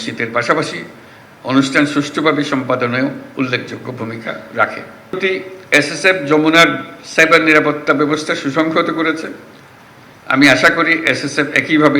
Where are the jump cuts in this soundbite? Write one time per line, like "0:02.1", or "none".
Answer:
0:05.2